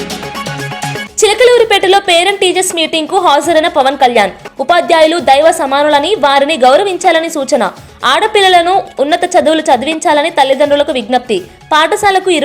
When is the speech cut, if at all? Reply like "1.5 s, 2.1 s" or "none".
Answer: 1.1 s